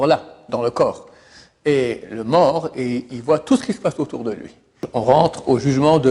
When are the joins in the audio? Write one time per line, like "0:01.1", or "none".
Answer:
0:04.8